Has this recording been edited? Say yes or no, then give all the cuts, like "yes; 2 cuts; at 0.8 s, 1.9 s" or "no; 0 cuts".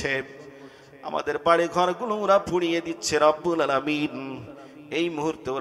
no; 0 cuts